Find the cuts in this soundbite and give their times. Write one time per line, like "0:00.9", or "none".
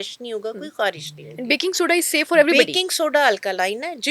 none